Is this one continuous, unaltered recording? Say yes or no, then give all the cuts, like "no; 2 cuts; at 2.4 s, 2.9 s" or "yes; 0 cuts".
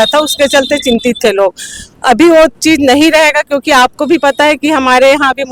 yes; 0 cuts